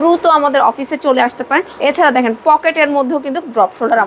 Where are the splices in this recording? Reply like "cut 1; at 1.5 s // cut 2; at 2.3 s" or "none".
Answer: cut 1; at 1.7 s